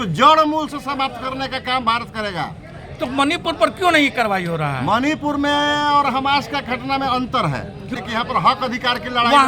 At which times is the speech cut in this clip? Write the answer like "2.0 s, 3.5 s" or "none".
7.9 s